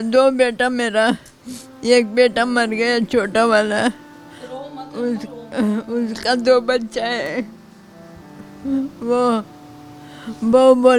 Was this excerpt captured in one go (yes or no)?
yes